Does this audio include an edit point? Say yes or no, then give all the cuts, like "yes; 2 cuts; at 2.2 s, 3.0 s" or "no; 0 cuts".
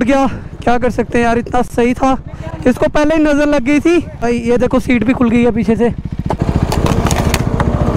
yes; 2 cuts; at 4.2 s, 6.4 s